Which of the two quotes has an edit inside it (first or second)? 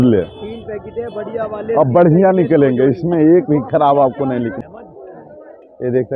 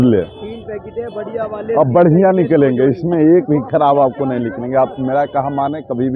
first